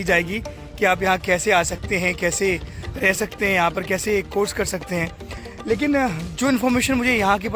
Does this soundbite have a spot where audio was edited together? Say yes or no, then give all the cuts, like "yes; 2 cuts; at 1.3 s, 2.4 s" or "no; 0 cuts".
no; 0 cuts